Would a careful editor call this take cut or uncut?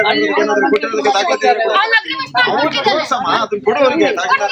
uncut